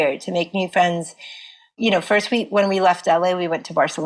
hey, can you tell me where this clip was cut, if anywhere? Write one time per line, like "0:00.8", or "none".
none

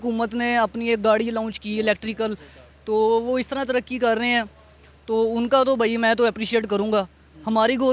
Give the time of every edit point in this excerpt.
none

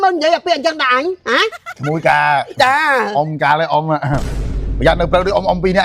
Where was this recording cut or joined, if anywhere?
0:01.7

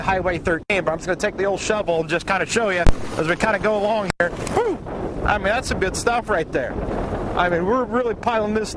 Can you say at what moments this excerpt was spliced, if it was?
none

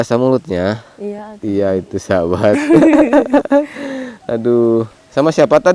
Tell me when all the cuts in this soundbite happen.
none

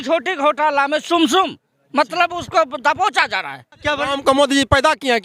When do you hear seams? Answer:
0:03.8

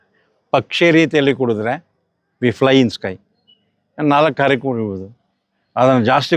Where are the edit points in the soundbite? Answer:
none

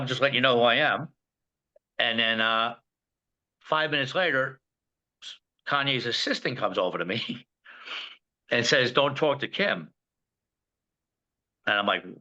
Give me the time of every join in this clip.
none

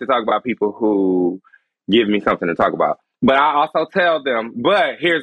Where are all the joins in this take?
0:03.1

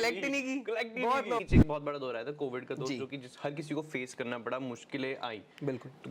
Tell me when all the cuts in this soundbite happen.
0:01.4

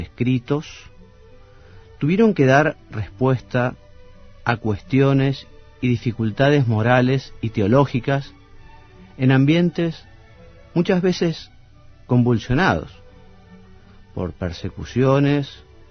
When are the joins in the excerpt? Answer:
0:05.0

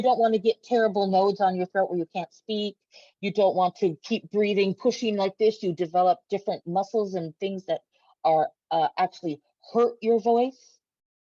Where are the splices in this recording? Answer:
none

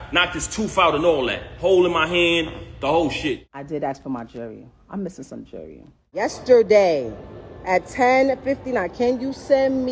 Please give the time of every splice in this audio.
0:03.5
0:06.2

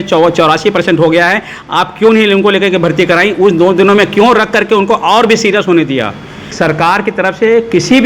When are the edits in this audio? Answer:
0:06.5

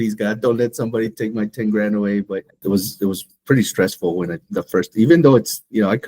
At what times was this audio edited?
0:02.6

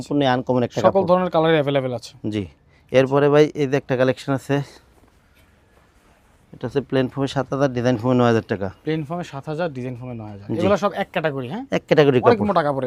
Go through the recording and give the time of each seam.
none

